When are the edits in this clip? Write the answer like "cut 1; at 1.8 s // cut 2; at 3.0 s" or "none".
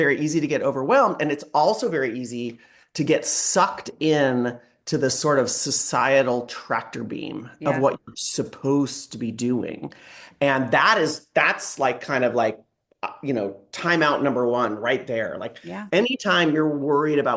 none

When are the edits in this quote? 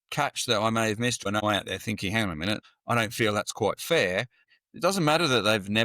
cut 1; at 1.3 s // cut 2; at 2.6 s // cut 3; at 4.5 s

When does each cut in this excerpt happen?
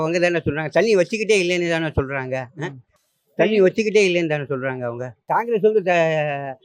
cut 1; at 5.1 s

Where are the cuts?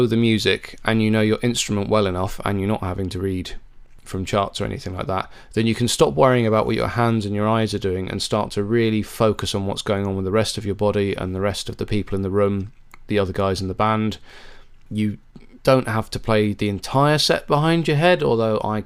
none

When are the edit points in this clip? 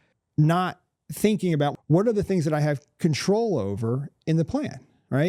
cut 1; at 1.7 s

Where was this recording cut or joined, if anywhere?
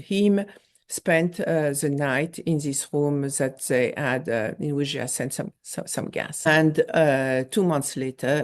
cut 1; at 6.5 s

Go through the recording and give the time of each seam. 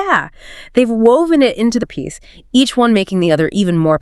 cut 1; at 1.8 s

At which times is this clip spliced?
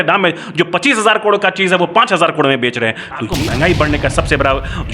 cut 1; at 3.3 s

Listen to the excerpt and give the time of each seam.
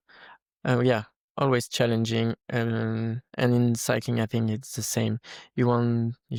none

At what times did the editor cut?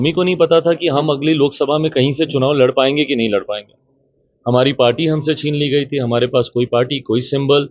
none

